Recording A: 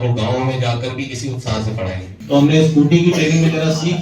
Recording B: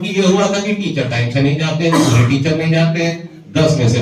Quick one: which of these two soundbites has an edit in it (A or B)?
A